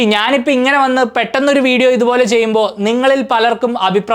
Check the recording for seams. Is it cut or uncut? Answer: uncut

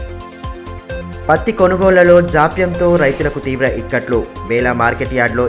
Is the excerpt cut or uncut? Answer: uncut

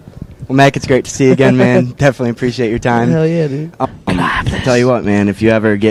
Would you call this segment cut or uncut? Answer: uncut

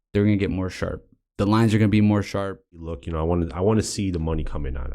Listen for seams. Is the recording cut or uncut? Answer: cut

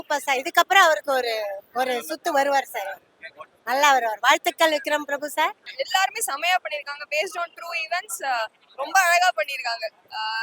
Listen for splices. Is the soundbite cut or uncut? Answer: cut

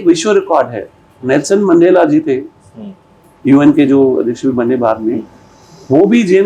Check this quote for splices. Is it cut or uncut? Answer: uncut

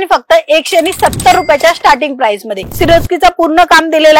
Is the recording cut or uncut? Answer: cut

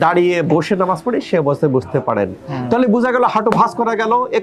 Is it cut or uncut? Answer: uncut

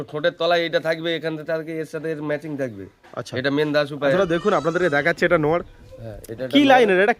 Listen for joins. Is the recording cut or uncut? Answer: cut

